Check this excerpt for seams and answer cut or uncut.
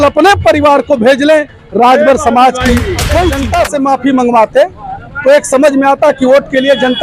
cut